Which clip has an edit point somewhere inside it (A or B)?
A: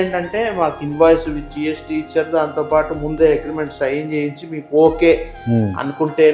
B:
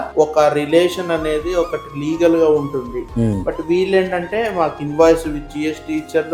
B